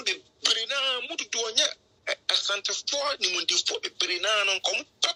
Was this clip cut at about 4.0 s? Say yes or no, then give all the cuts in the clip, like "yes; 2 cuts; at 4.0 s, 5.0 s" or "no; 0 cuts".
no; 0 cuts